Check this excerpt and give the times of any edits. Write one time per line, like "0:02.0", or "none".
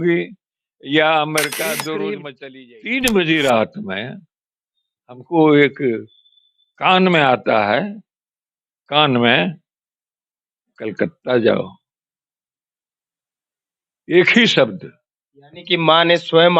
0:02.2